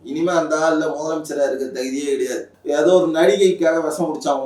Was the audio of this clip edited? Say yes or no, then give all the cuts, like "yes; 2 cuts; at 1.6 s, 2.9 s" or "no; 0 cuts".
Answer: yes; 1 cut; at 2.5 s